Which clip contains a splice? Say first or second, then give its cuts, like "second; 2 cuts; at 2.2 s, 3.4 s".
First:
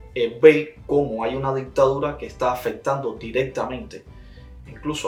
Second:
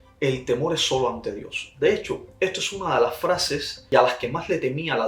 second; 1 cut; at 3.8 s